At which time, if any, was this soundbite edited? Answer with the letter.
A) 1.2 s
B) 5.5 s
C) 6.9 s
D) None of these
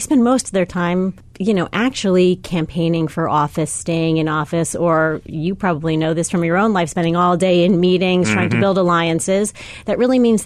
A